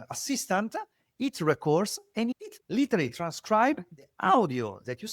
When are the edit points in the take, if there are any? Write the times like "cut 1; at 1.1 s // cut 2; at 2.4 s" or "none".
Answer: cut 1; at 2.4 s